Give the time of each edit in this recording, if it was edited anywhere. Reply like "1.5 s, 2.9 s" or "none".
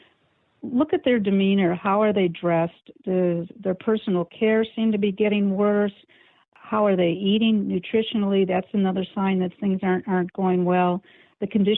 none